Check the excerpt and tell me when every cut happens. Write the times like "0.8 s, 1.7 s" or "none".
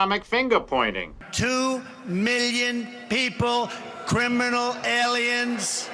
1.6 s